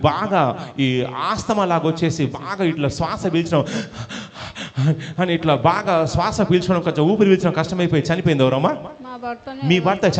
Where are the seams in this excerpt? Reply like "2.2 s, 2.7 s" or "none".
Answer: none